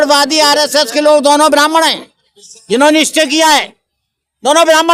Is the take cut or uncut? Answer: uncut